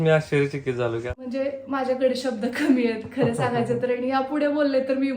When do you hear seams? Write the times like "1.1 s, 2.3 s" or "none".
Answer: 1.1 s